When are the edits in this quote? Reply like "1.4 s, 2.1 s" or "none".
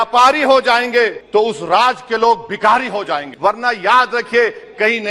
1.2 s, 3.3 s